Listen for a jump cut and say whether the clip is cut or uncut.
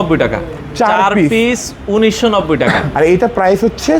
cut